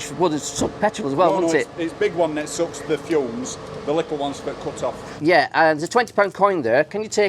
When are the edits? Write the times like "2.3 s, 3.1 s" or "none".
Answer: 5.1 s